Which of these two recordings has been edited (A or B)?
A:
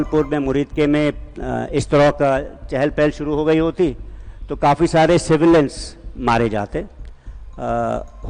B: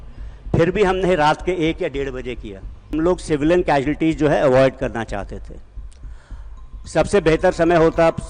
B